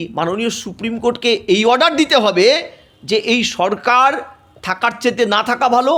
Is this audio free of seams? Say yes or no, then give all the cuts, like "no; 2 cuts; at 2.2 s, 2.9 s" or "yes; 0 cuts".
yes; 0 cuts